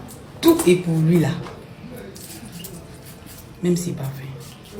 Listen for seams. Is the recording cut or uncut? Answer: uncut